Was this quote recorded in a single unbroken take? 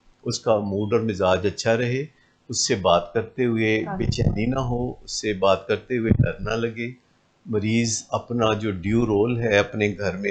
yes; 0 cuts

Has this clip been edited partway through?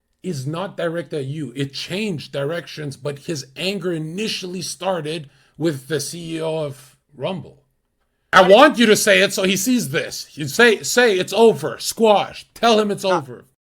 yes; 1 cut; at 8.3 s

